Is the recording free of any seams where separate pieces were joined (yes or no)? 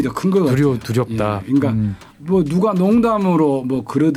yes